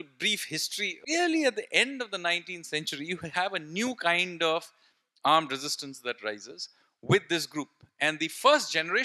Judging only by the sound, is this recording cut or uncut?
cut